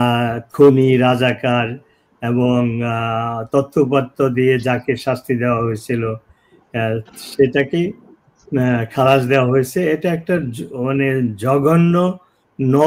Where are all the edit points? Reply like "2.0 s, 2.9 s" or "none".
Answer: none